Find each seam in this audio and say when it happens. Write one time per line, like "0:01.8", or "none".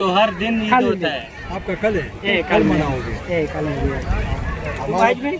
none